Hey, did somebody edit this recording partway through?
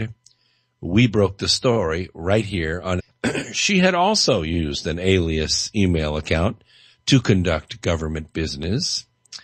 no; 0 cuts

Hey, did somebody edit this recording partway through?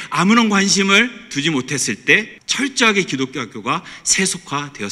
yes; 1 cut; at 2.4 s

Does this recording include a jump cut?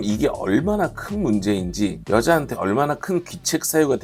no; 0 cuts

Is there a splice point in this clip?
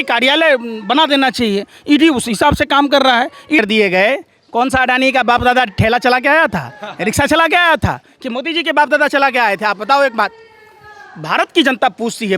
yes; 1 cut; at 3.6 s

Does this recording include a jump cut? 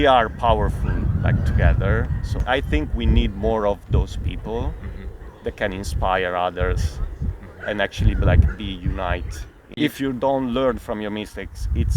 yes; 2 cuts; at 2.4 s, 9.6 s

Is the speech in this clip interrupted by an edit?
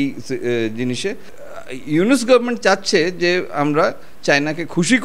yes; 1 cut; at 1.3 s

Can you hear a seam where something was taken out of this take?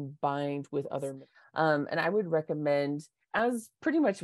yes; 1 cut; at 1.2 s

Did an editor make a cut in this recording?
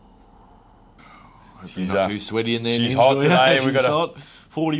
yes; 1 cut; at 1.0 s

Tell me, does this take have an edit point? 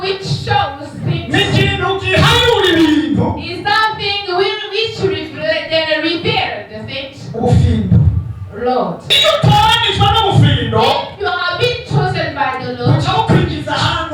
yes; 1 cut; at 9.2 s

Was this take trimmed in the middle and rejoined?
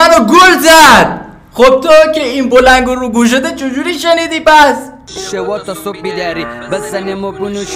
yes; 1 cut; at 5.2 s

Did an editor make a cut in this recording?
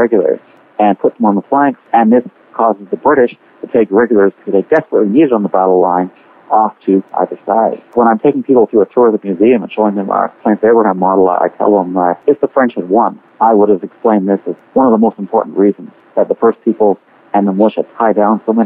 yes; 2 cuts; at 12.2 s, 15.9 s

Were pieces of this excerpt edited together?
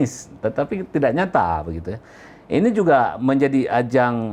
no; 0 cuts

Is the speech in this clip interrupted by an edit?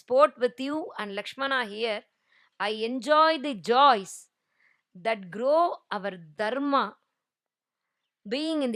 no; 0 cuts

